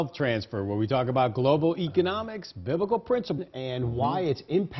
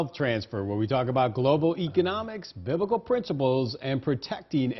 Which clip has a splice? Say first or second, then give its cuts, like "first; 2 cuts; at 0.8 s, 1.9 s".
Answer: second; 1 cut; at 3.4 s